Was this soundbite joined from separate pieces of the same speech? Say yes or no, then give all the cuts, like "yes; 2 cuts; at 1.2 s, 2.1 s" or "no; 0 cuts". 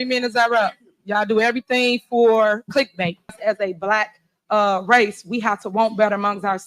yes; 1 cut; at 3.4 s